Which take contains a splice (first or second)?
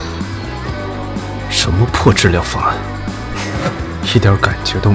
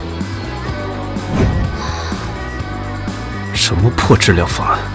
first